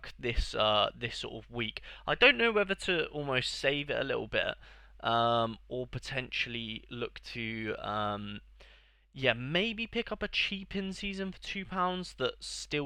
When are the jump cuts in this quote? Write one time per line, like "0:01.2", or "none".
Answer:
none